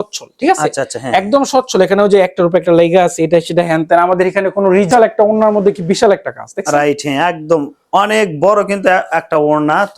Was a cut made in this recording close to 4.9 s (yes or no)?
yes